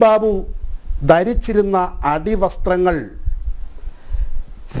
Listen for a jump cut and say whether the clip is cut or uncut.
uncut